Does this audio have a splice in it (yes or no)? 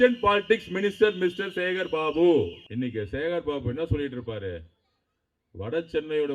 yes